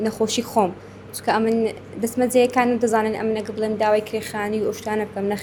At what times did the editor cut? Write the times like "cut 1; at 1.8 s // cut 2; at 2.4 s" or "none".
none